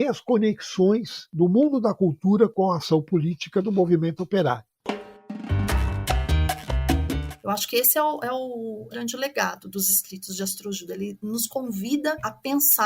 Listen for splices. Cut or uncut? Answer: cut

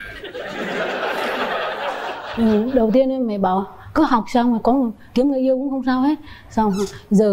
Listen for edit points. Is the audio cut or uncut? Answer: uncut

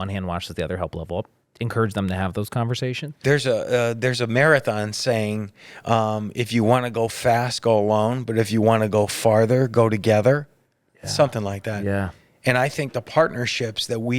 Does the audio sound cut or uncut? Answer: cut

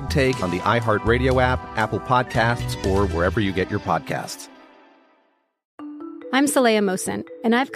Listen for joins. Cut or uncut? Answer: cut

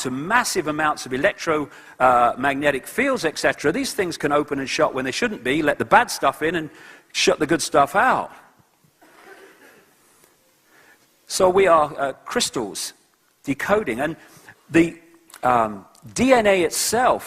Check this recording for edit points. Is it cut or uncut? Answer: cut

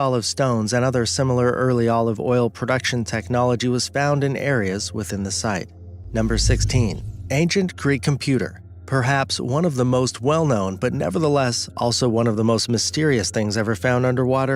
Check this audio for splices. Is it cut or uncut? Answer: cut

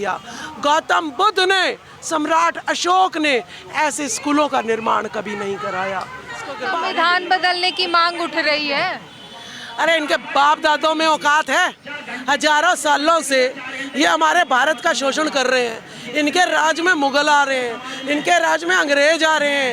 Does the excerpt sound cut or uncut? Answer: cut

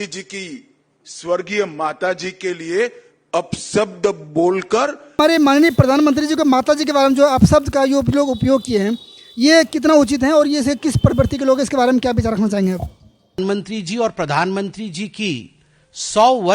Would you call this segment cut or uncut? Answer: cut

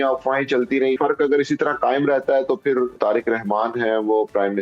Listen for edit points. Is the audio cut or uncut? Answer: cut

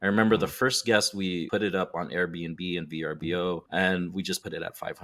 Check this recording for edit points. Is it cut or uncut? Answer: uncut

